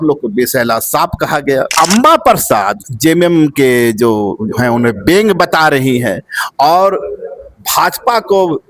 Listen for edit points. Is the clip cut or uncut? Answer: cut